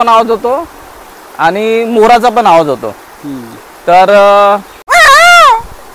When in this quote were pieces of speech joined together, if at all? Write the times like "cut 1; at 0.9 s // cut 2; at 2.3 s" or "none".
cut 1; at 4.7 s